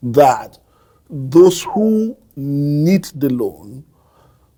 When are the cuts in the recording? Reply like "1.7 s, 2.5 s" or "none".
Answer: none